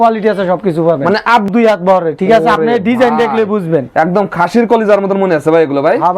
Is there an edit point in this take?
yes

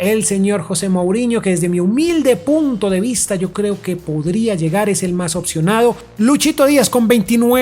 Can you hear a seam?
yes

